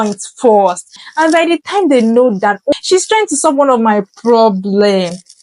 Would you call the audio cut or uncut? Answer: cut